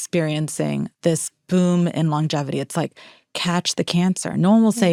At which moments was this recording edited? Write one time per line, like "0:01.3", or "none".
none